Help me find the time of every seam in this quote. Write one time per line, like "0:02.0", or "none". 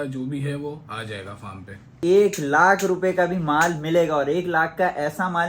0:01.9